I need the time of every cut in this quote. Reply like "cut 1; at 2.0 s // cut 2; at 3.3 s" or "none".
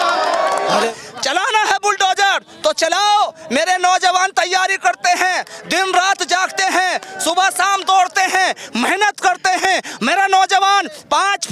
cut 1; at 0.9 s